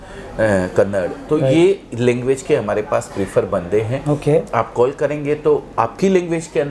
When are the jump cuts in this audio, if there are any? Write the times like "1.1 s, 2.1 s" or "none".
none